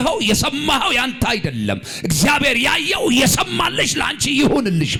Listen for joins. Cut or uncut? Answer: uncut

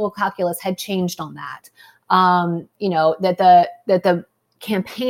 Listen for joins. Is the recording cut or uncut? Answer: uncut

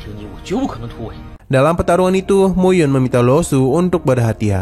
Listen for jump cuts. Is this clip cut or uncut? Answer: uncut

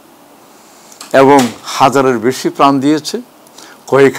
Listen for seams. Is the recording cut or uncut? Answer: uncut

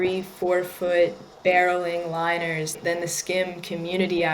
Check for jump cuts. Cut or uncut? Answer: cut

